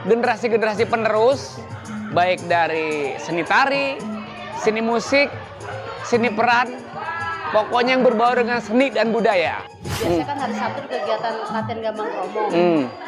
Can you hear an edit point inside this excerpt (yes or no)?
yes